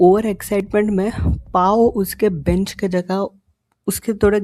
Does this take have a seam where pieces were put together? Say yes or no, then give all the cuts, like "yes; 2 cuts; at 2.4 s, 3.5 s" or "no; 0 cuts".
no; 0 cuts